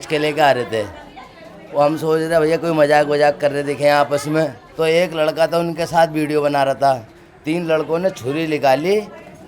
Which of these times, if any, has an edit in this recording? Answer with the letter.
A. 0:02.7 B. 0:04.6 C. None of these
B